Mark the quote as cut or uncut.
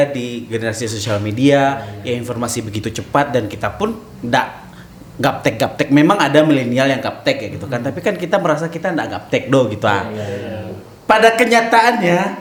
uncut